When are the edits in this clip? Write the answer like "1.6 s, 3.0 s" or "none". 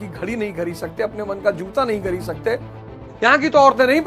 2.9 s